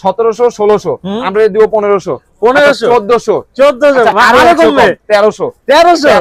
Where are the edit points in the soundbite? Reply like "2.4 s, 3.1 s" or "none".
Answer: none